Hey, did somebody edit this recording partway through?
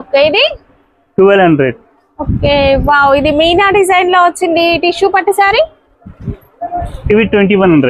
no; 0 cuts

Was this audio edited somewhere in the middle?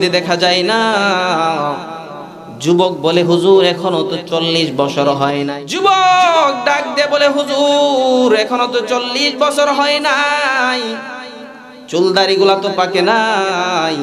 yes; 1 cut; at 5.5 s

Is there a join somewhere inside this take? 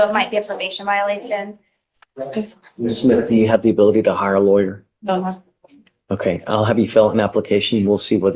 no; 0 cuts

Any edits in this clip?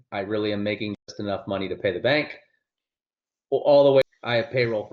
yes; 1 cut; at 4.0 s

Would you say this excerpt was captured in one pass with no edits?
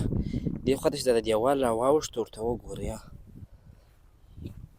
yes; 0 cuts

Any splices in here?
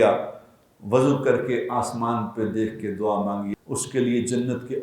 yes; 1 cut; at 3.5 s

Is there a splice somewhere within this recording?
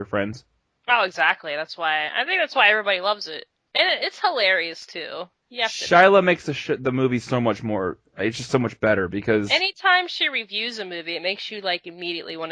yes; 1 cut; at 5.7 s

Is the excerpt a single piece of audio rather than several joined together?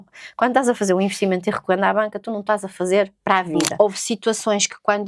no; 1 cut; at 3.6 s

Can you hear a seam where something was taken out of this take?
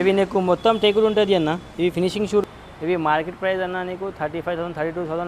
yes; 1 cut; at 2.4 s

